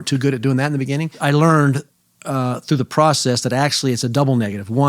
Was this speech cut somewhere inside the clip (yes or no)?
yes